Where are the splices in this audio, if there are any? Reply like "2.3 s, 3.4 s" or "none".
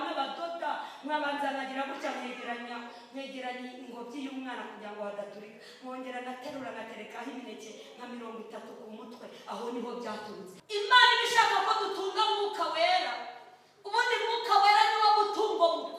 10.9 s